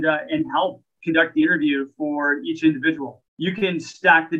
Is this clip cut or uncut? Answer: cut